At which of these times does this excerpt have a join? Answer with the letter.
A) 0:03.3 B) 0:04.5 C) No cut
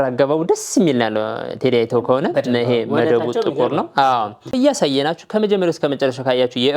B